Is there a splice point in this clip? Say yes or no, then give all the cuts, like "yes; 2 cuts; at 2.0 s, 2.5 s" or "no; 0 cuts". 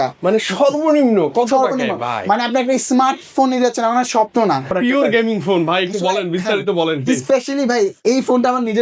yes; 1 cut; at 4.7 s